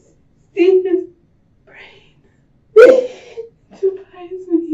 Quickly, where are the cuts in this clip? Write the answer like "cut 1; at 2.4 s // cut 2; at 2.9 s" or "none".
cut 1; at 2.6 s